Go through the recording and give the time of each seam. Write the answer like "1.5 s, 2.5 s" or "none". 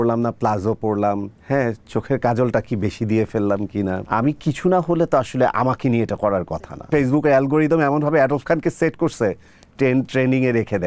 1.3 s, 4.0 s, 6.9 s